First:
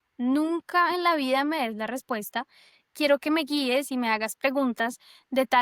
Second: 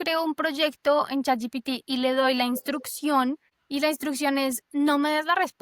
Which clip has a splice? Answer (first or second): second